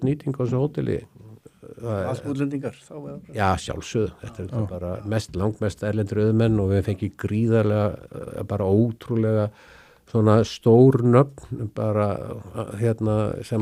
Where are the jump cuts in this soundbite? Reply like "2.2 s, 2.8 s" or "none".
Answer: none